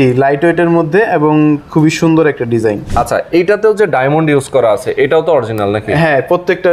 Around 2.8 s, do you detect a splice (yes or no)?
yes